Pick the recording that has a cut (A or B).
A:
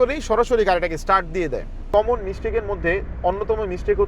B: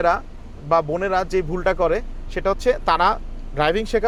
A